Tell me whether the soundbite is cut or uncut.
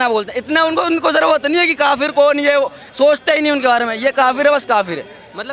uncut